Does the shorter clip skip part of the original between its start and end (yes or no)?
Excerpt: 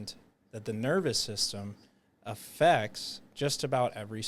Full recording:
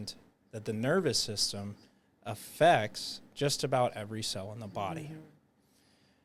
no